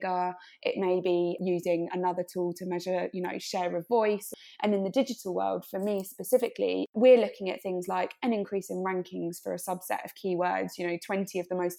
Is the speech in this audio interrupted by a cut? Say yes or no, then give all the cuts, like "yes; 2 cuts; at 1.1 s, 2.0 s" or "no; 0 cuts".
yes; 3 cuts; at 1.4 s, 4.3 s, 6.9 s